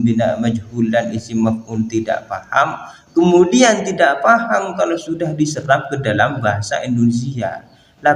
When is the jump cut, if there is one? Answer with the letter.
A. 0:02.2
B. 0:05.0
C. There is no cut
C